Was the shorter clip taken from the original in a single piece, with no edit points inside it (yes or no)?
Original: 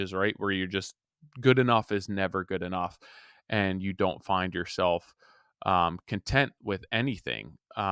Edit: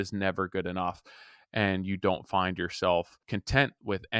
no